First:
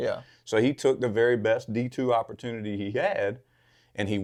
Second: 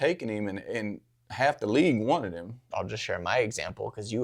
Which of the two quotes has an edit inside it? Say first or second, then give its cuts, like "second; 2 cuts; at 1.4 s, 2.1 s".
second; 1 cut; at 2.7 s